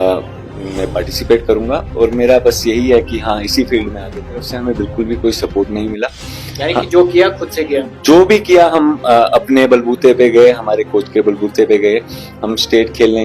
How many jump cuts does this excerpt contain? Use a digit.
1